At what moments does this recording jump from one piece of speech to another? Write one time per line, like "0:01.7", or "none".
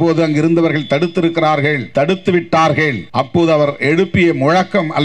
0:01.8
0:03.0